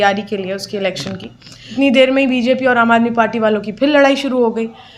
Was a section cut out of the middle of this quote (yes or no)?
yes